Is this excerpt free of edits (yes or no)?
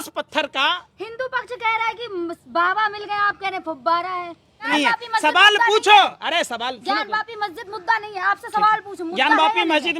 no